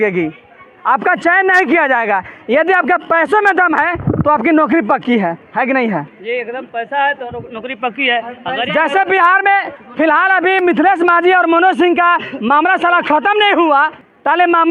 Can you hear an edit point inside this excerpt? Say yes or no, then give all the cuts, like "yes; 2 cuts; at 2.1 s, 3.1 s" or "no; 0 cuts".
no; 0 cuts